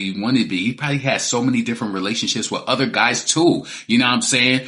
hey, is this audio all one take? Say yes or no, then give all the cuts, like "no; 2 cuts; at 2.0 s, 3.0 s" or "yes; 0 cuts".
yes; 0 cuts